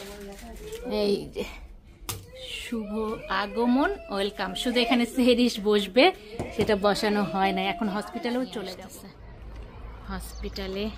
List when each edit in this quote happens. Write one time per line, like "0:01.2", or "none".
0:08.8